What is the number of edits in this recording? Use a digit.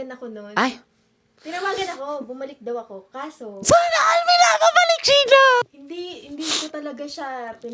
1